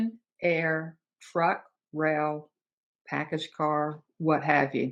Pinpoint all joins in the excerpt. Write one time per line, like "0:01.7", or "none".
none